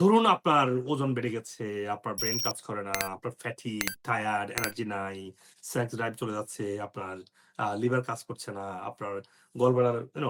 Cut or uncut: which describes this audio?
uncut